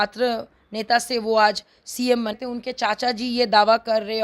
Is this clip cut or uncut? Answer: cut